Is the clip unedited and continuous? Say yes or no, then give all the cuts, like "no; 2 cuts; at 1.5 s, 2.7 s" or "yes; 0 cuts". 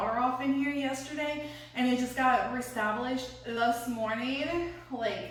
yes; 0 cuts